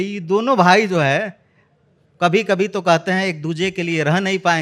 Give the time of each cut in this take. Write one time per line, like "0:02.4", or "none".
none